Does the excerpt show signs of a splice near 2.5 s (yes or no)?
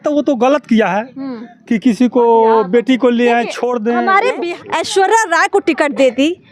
no